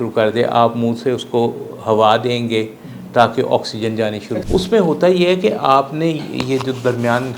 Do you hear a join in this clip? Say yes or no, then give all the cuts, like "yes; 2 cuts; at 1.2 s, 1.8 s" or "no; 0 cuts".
yes; 1 cut; at 4.3 s